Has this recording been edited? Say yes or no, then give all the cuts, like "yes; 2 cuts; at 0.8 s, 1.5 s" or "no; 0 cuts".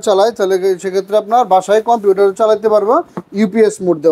no; 0 cuts